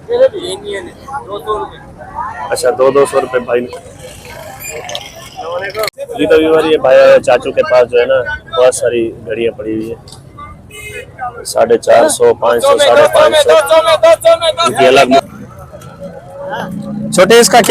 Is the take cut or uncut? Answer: cut